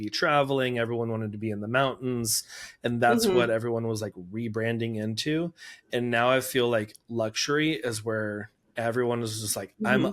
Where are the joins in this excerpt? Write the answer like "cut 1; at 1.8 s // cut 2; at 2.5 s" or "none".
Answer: none